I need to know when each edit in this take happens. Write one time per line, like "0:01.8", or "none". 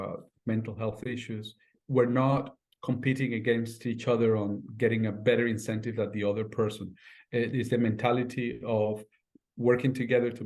0:01.8